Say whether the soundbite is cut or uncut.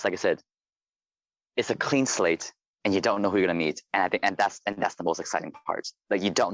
uncut